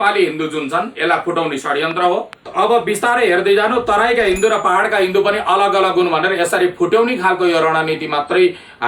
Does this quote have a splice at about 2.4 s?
yes; 1 cut; at 2.4 s

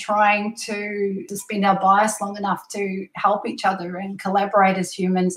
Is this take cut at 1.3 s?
yes; 1 cut; at 1.3 s

